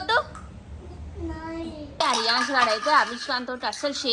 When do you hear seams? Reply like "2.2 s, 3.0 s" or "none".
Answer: 2.0 s